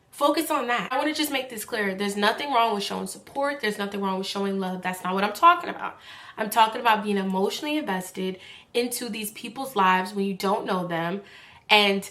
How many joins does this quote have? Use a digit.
1